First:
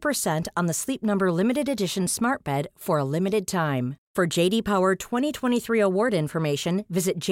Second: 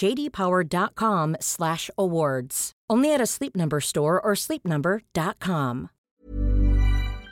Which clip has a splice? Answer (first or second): second